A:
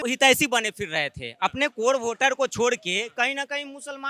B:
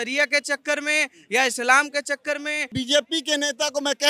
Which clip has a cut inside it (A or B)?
B